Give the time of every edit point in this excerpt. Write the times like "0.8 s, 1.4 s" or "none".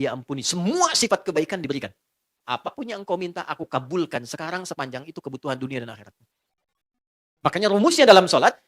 2.4 s

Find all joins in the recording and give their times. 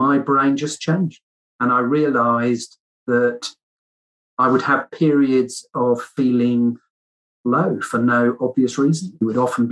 none

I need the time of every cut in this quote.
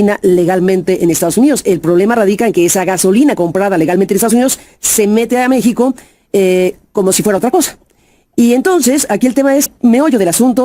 9.7 s

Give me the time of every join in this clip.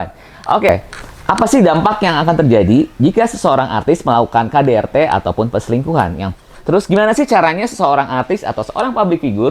0.8 s, 6.2 s

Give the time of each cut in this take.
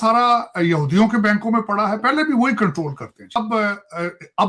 3.4 s

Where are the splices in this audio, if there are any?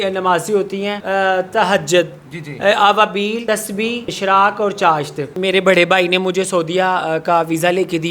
1.0 s, 4.0 s, 5.3 s

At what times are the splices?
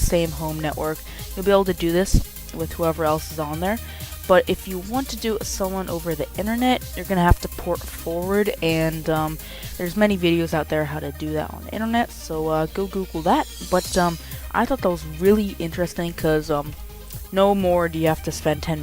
11.1 s

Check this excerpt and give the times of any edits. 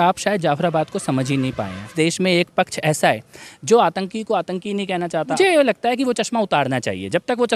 1.9 s, 5.4 s

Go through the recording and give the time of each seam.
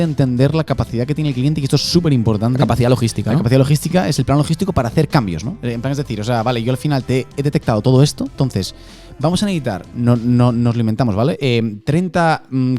none

